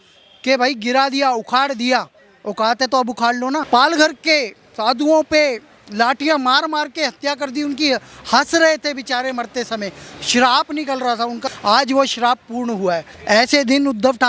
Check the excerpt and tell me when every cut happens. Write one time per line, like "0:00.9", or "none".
0:03.6
0:13.1